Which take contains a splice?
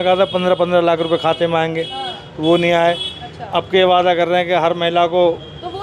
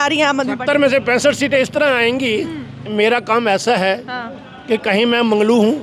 second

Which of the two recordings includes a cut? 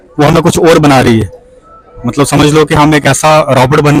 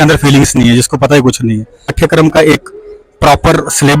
second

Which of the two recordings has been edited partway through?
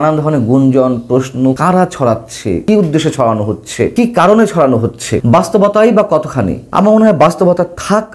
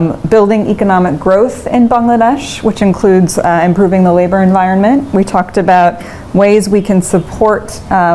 first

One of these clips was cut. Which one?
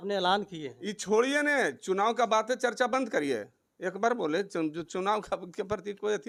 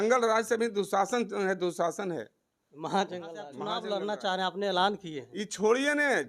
second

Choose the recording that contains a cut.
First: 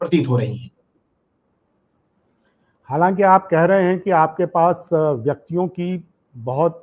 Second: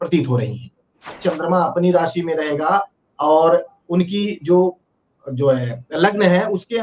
second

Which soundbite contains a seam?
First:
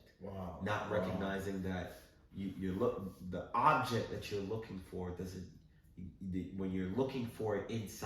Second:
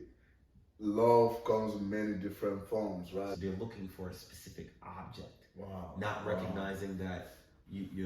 second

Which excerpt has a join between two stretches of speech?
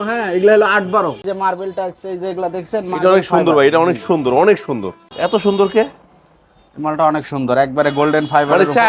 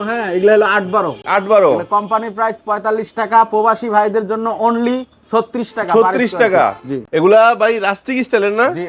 first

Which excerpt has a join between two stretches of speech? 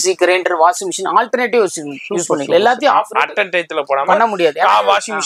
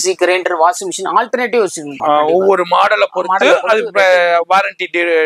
second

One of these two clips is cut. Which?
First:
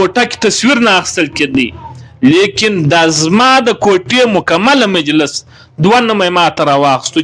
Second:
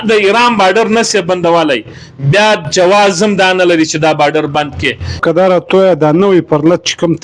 second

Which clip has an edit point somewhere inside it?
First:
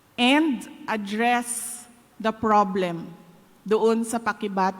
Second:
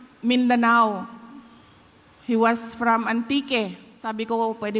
second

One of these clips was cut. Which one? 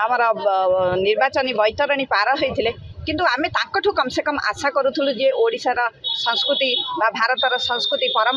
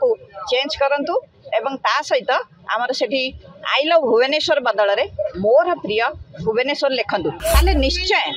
second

